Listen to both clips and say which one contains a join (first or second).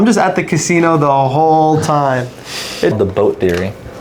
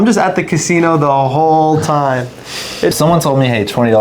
second